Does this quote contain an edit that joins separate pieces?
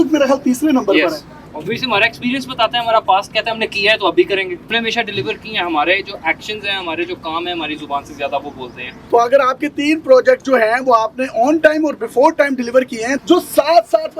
yes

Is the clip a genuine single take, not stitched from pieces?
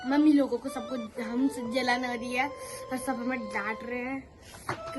yes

